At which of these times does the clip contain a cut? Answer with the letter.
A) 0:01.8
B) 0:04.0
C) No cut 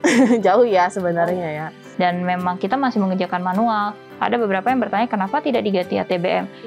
A